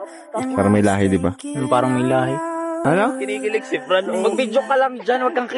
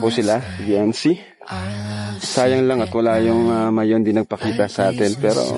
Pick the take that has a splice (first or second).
first